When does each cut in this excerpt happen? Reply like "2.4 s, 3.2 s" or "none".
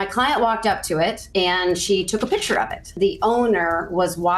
1.2 s, 2.9 s